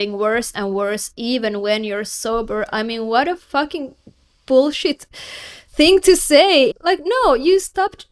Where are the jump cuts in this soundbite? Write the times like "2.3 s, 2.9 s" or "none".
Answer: 6.8 s